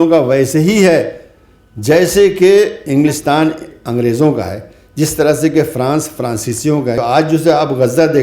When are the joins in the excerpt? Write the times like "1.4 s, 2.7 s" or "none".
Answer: 7.0 s